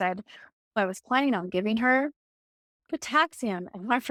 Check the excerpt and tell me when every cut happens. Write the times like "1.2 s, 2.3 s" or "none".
none